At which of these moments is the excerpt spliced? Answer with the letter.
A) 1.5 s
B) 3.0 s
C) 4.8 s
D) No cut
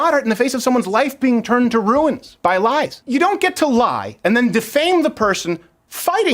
B